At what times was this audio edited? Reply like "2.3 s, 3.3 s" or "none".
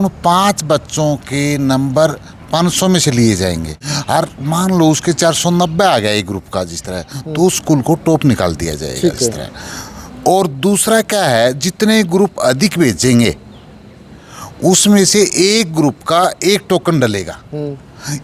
none